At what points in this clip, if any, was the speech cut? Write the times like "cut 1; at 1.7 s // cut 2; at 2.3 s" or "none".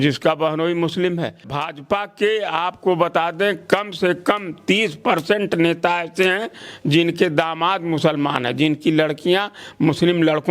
cut 1; at 1.5 s